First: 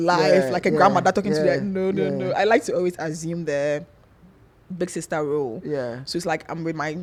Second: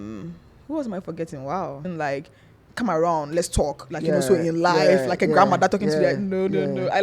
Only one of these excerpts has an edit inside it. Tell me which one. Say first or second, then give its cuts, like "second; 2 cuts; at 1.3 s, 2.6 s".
second; 1 cut; at 1.9 s